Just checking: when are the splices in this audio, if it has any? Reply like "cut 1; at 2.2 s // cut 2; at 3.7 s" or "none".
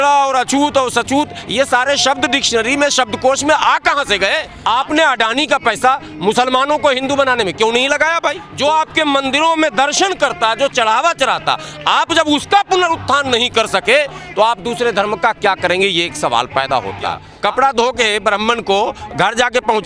cut 1; at 4.5 s // cut 2; at 8.5 s // cut 3; at 17.3 s